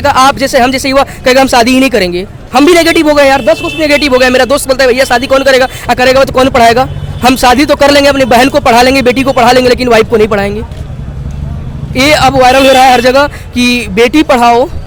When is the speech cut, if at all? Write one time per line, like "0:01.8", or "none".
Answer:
none